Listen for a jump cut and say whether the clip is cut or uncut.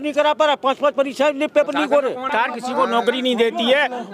cut